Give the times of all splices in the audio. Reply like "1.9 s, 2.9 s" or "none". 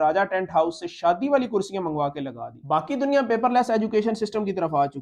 2.6 s